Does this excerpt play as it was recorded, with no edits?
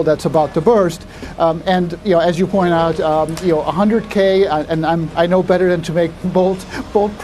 yes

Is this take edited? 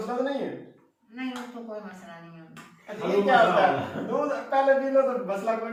no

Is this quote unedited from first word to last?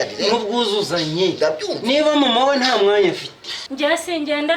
no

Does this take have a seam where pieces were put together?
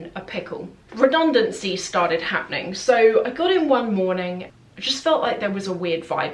yes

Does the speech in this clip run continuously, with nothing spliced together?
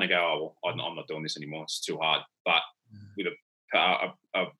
yes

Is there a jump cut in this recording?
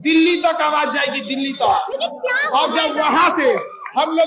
no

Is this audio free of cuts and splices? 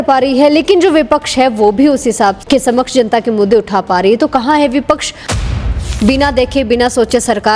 no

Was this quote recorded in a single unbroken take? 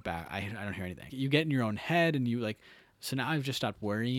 no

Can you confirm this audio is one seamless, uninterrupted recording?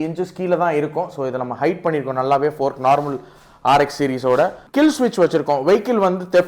no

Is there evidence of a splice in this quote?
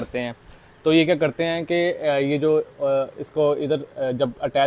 no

